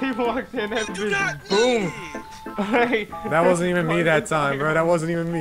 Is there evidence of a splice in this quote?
no; 0 cuts

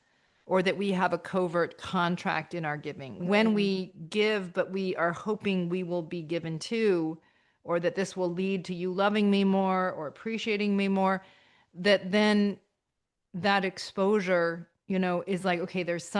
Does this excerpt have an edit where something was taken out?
yes; 1 cut; at 3.2 s

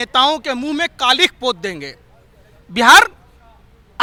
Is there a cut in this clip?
no; 0 cuts

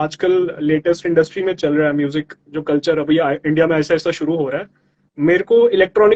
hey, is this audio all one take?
yes; 0 cuts

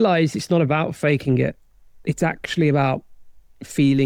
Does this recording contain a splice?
no; 0 cuts

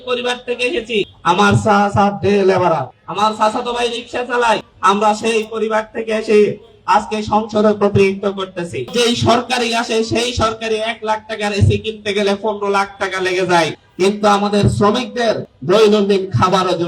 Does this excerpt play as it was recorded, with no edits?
no; 6 cuts; at 1.1 s, 3.0 s, 4.7 s, 8.9 s, 13.8 s, 15.5 s

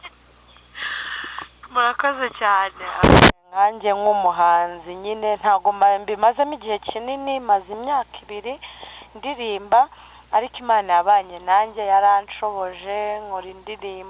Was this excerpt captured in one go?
no; 1 cut; at 3.0 s

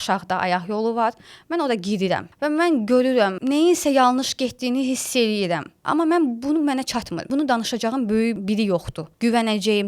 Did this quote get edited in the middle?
yes; 5 cuts; at 2.3 s, 3.4 s, 5.7 s, 7.3 s, 8.7 s

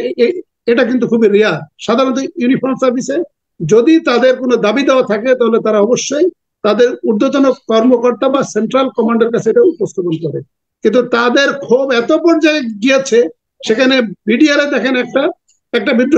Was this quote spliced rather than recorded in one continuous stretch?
no; 0 cuts

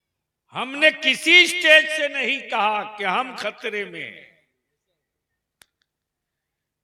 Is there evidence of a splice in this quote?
no; 0 cuts

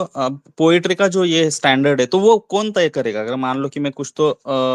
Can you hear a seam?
no; 0 cuts

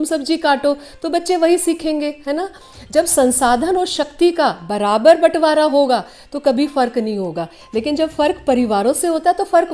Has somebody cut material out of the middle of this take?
no; 0 cuts

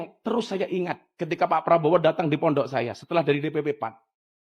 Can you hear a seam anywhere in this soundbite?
no; 0 cuts

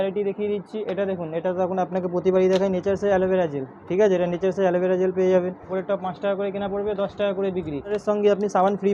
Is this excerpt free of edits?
no; 2 cuts; at 5.6 s, 8.0 s

